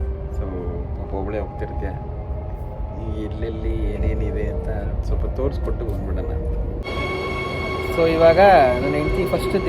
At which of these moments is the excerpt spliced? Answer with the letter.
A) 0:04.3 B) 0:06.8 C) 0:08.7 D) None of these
B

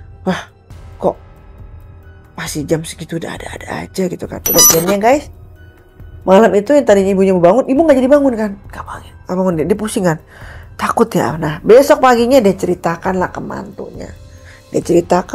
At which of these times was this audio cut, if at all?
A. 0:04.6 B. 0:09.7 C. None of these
A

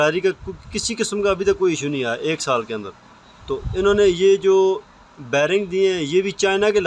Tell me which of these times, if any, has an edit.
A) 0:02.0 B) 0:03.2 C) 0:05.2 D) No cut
D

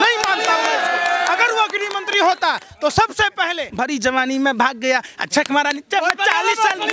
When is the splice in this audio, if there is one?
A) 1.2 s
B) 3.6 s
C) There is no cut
B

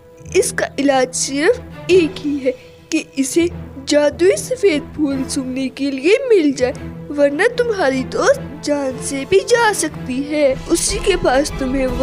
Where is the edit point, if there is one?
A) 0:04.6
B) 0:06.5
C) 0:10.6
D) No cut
C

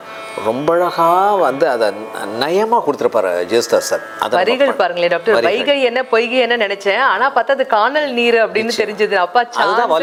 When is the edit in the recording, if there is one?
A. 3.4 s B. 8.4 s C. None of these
C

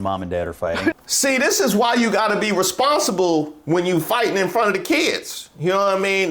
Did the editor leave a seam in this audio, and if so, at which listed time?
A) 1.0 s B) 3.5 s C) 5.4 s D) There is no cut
A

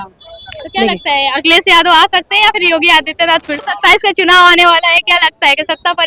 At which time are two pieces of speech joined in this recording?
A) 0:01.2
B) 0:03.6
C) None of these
B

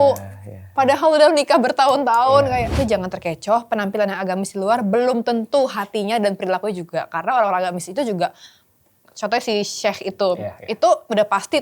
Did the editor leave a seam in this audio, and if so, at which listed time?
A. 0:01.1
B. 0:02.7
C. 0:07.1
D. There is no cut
B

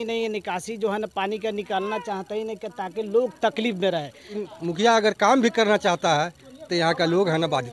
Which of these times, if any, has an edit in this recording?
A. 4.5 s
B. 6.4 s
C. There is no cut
A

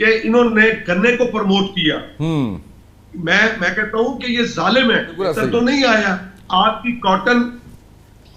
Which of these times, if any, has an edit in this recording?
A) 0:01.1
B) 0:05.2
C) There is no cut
B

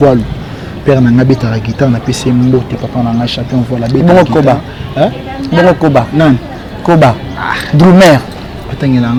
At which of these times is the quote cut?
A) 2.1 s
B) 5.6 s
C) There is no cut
C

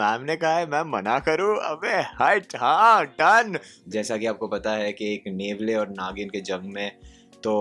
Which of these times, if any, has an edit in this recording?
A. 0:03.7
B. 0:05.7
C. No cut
A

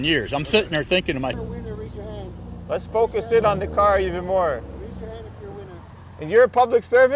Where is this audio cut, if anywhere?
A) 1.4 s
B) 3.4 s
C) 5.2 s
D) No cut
A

